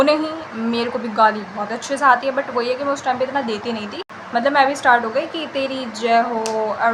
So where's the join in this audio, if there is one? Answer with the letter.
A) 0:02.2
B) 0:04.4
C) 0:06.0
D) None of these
D